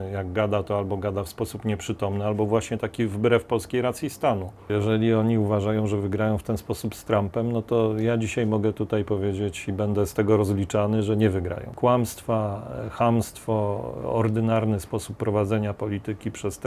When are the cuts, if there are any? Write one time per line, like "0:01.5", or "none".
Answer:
0:04.6
0:11.6